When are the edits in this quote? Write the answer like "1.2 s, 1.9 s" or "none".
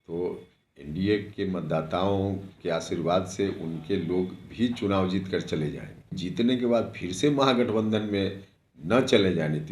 6.1 s